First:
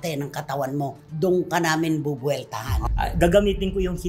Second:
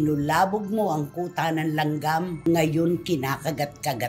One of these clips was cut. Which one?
first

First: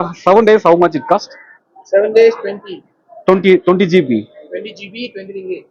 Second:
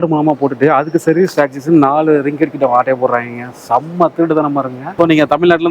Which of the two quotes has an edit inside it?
second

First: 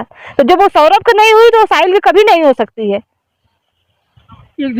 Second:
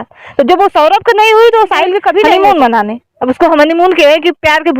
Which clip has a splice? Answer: second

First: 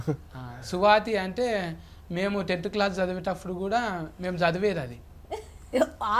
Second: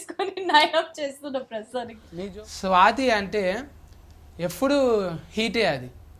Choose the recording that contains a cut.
second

